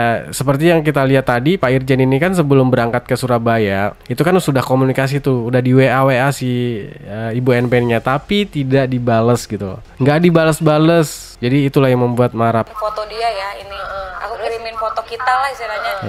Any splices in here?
yes; 1 cut; at 12.6 s

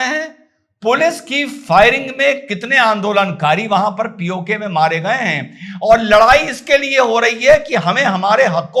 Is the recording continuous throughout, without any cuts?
yes; 0 cuts

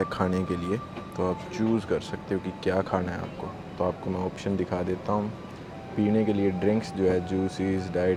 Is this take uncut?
yes; 0 cuts

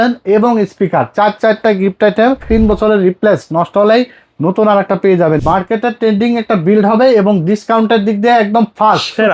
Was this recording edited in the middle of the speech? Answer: yes; 2 cuts; at 2.5 s, 5.4 s

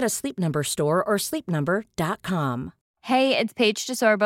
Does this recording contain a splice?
no; 0 cuts

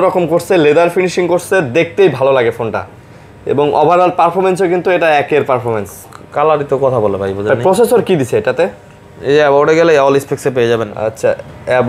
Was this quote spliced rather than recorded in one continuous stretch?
no; 0 cuts

